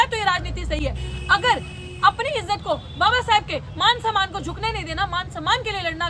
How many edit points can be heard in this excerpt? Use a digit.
0